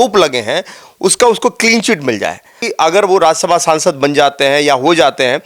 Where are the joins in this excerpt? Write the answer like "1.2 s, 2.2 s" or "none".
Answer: 2.6 s